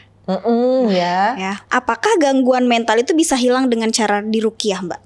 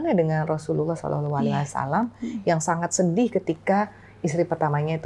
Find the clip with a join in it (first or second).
first